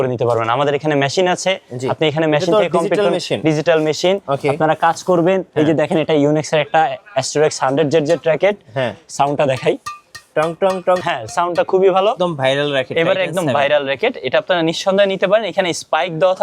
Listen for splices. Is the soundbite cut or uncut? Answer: cut